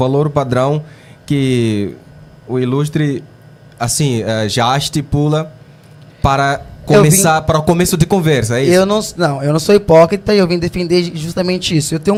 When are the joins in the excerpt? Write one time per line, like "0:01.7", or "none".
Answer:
none